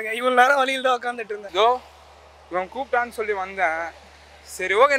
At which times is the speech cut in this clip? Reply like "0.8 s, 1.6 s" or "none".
1.3 s